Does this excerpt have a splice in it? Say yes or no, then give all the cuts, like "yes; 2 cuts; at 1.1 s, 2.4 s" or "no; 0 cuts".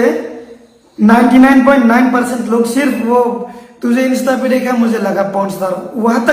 no; 0 cuts